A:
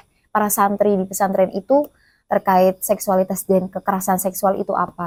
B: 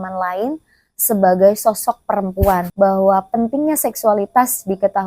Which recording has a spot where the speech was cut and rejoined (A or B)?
B